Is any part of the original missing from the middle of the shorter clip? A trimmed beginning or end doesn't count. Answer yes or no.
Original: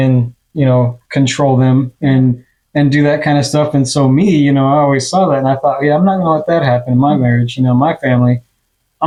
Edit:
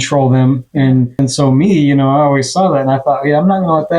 yes